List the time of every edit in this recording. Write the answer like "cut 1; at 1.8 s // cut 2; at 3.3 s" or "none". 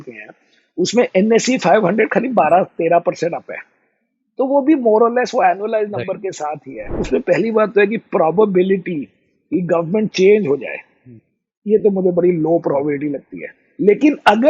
cut 1; at 6.8 s